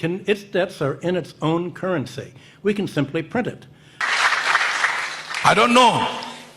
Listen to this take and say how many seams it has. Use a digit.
1